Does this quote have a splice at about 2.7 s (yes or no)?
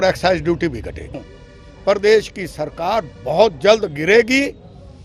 no